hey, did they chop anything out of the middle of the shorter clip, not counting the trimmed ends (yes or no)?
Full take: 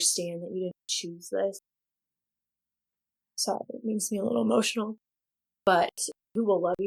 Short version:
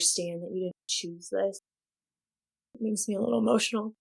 yes